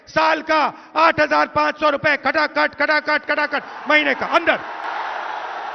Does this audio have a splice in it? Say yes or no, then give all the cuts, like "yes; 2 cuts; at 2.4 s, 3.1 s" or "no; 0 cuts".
no; 0 cuts